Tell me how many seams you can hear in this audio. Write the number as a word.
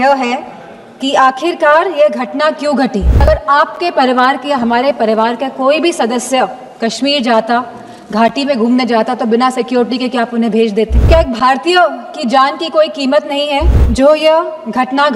three